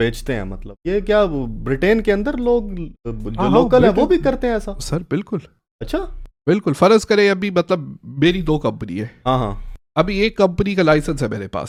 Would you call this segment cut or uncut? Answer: uncut